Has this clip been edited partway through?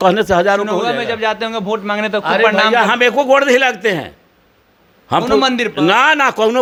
no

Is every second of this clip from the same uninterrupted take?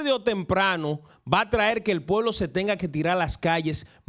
yes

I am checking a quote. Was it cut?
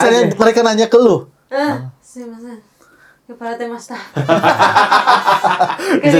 no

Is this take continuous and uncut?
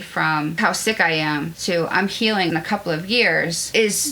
no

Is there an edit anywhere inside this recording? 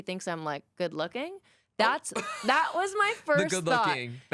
no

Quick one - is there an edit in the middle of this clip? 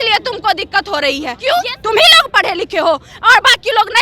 yes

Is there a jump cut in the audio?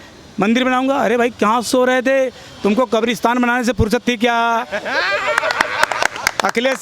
no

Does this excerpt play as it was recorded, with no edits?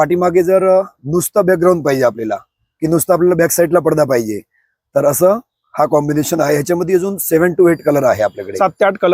yes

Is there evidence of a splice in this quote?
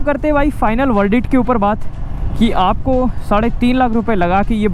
no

